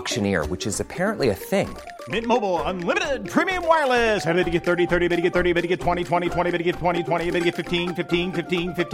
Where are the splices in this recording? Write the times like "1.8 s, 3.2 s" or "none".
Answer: none